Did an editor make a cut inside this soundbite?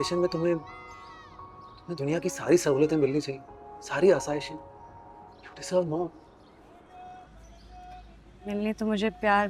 no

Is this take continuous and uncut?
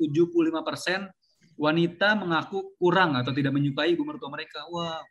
yes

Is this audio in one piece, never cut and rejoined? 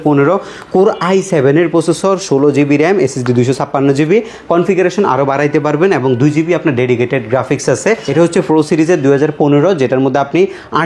no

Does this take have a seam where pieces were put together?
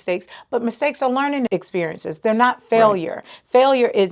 yes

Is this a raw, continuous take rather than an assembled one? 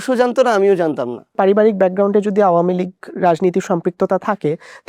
no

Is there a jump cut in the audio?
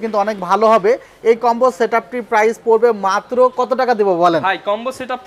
no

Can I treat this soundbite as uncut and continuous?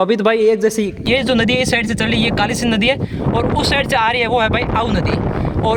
no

